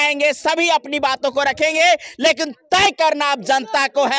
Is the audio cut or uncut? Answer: uncut